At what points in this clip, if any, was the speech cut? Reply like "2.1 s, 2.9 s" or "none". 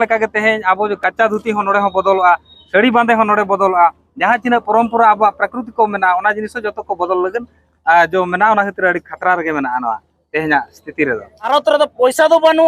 11.5 s